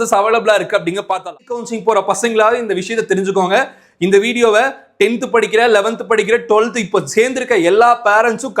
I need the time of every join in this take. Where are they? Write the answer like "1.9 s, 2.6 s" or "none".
1.6 s